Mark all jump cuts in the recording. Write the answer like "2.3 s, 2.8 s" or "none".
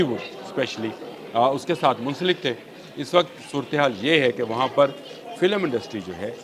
none